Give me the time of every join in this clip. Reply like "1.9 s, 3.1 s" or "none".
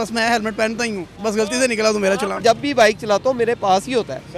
1.1 s, 2.4 s